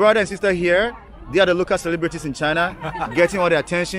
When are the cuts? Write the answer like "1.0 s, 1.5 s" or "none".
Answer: none